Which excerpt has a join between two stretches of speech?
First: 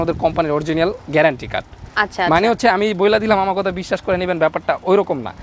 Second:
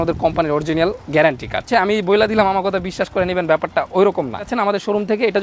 second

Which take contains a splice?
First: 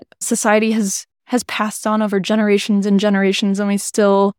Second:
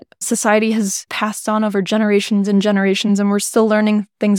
second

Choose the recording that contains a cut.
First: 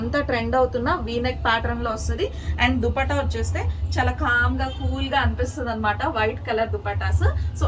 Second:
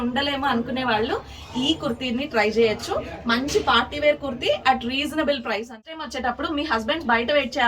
second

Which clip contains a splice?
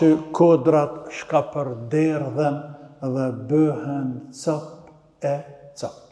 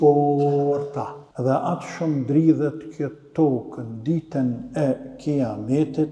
second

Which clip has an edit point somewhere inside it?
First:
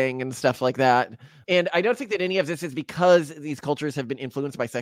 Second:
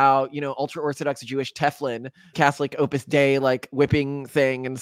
second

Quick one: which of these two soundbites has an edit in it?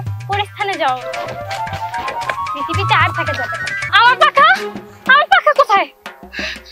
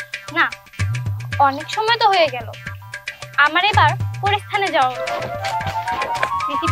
first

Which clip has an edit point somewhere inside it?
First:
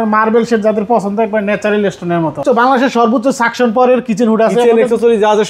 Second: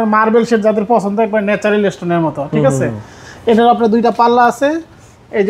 first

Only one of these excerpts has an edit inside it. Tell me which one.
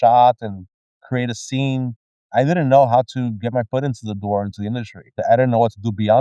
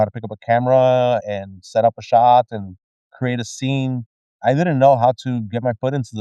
first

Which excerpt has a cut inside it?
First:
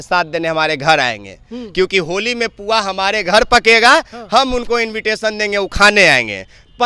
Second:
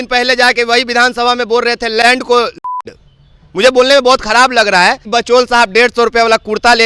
second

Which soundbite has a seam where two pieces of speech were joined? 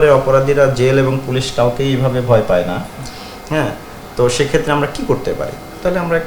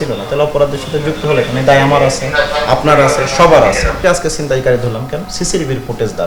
second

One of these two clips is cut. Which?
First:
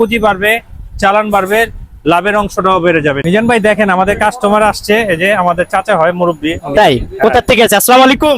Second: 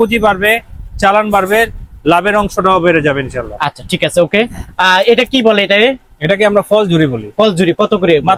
first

